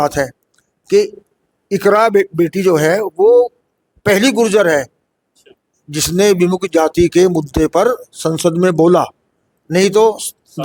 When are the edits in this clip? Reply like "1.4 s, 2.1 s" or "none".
none